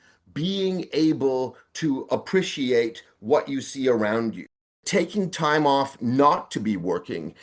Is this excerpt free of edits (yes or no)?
no